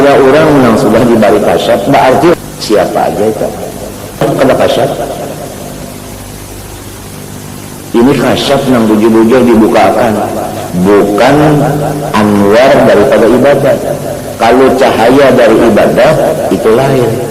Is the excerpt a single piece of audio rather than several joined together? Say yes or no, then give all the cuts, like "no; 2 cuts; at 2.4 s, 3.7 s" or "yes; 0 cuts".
no; 2 cuts; at 2.3 s, 4.2 s